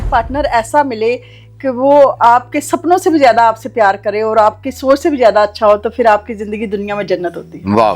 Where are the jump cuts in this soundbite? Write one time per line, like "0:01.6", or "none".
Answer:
none